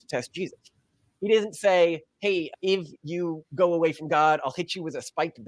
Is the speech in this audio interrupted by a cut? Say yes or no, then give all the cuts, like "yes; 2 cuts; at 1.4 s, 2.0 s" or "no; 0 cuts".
no; 0 cuts